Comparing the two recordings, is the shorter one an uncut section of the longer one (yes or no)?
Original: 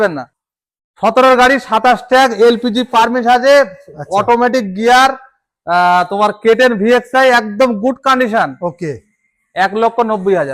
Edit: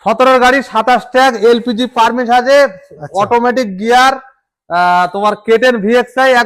yes